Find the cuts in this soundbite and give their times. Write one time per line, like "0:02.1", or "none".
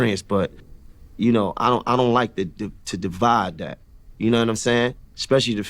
0:01.5
0:04.9